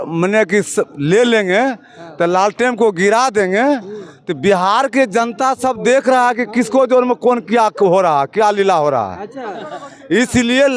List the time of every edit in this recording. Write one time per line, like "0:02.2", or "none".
none